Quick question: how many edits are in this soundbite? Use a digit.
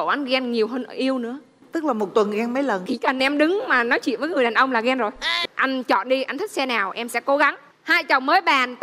1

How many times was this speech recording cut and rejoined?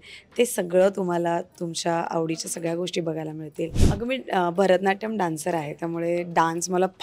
1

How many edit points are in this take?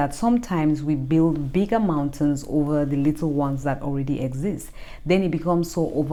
0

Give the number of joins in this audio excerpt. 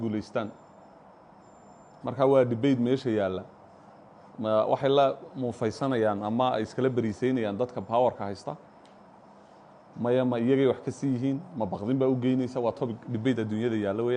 0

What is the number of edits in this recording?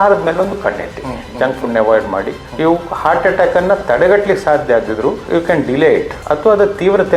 3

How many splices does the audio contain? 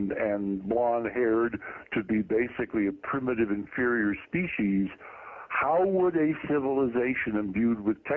1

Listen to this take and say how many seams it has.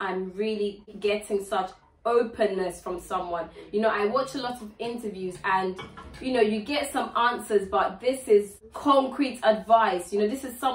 2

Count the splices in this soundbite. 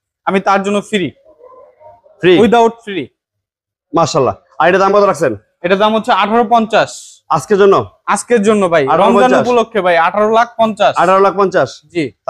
0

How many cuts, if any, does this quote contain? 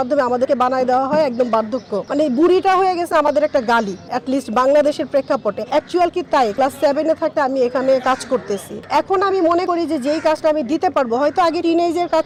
0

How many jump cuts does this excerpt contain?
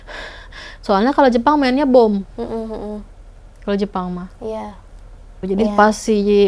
0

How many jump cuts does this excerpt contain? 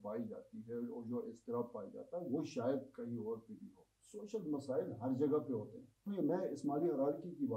1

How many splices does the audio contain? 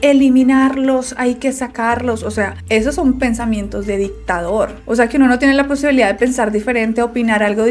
0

